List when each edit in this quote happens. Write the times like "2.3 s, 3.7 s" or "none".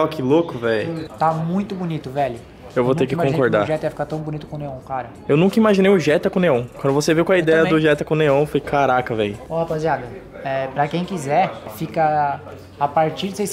1.0 s